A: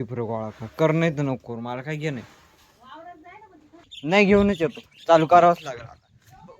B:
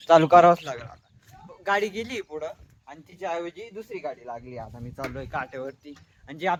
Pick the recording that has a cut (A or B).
A